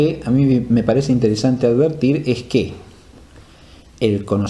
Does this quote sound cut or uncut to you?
uncut